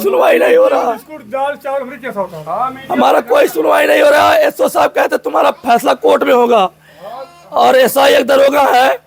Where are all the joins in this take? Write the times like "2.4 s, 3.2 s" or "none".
none